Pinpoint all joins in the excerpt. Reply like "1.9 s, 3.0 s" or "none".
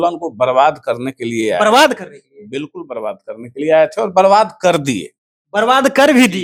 none